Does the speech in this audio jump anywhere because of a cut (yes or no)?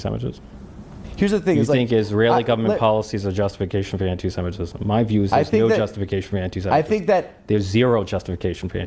no